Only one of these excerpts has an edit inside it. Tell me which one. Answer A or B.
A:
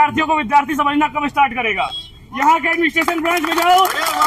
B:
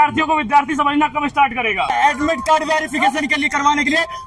B